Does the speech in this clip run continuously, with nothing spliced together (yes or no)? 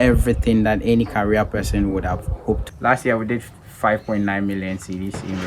no